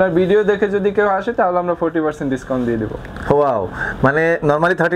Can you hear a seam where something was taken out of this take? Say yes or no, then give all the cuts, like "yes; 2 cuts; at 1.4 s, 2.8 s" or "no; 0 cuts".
no; 0 cuts